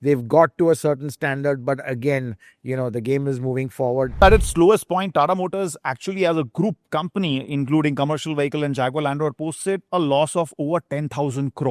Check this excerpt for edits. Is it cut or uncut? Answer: cut